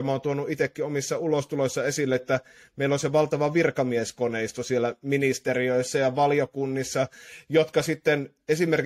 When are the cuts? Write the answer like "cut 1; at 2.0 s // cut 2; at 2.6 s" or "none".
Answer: none